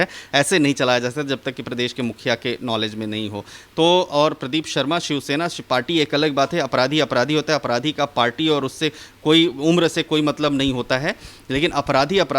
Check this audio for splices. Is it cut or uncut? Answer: uncut